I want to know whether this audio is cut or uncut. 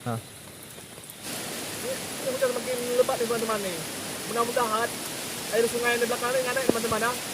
cut